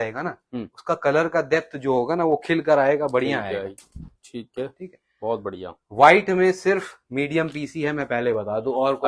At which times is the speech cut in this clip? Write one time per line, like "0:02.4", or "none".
none